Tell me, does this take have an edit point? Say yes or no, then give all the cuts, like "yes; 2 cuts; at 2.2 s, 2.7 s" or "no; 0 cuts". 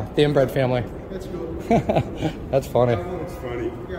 no; 0 cuts